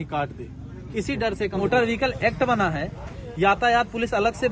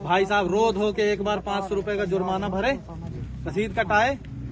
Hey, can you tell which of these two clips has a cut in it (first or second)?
first